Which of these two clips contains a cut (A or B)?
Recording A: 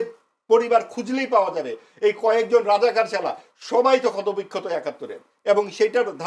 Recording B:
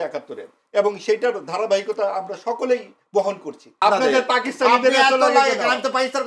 B